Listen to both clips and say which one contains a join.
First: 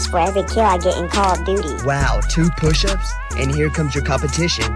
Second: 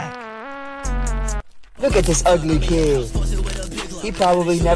second; 1 cut; at 1.6 s

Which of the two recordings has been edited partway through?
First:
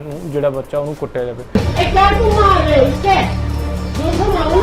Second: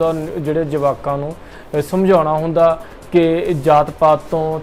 first; 1 cut; at 1.4 s

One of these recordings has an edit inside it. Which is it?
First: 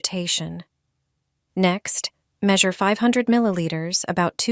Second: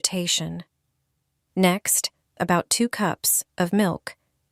second; 1 cut; at 2.2 s

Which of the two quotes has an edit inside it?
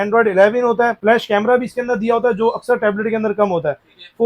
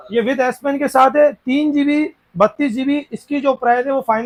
first; 1 cut; at 1.0 s

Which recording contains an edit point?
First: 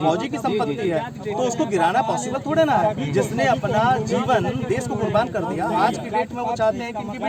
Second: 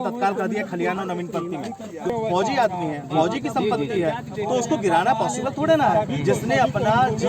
second; 1 cut; at 2.1 s

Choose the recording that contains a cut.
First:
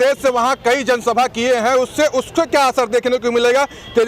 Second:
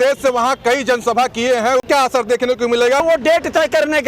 second; 2 cuts; at 1.8 s, 3.0 s

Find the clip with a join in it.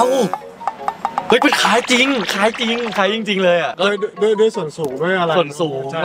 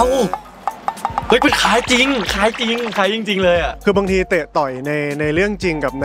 second; 1 cut; at 3.7 s

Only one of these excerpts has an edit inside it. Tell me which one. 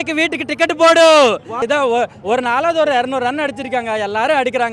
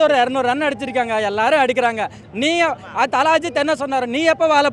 first; 1 cut; at 1.6 s

